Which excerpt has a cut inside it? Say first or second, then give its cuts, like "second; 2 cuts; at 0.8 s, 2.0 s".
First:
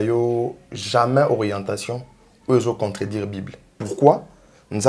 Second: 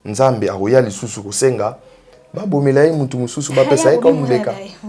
first; 1 cut; at 3.7 s